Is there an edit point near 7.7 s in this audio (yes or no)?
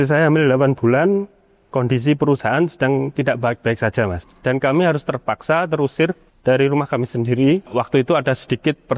yes